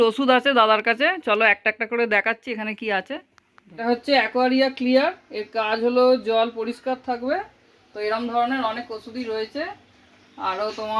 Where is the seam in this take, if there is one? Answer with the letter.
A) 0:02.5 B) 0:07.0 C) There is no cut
C